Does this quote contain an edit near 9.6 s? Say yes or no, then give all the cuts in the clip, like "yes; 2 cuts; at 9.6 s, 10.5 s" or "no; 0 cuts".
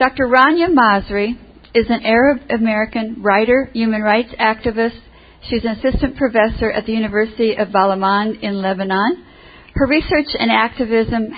yes; 1 cut; at 9.6 s